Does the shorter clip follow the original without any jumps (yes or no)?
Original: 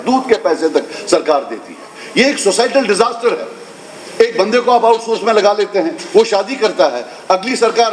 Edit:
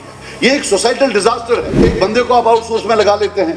no